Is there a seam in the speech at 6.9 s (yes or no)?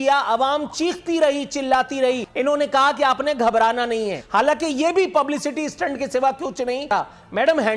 yes